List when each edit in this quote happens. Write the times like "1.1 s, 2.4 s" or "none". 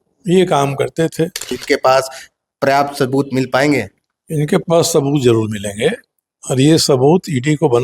1.6 s